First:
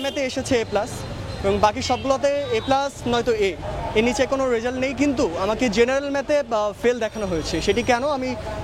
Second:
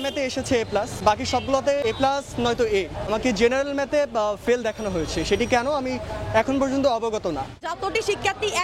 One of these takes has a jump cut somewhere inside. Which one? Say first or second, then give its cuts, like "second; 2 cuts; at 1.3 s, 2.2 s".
second; 4 cuts; at 1.0 s, 1.8 s, 3.0 s, 7.6 s